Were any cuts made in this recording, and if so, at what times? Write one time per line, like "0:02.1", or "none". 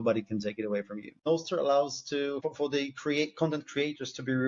0:01.2
0:02.4